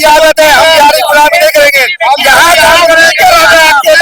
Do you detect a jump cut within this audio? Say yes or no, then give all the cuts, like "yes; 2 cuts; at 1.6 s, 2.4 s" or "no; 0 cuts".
no; 0 cuts